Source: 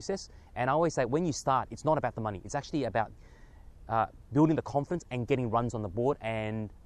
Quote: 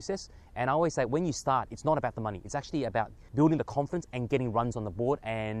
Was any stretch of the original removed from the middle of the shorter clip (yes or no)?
yes